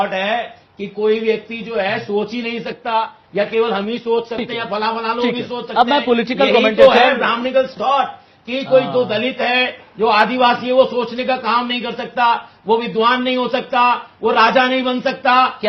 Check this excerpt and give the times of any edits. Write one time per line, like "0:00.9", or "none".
none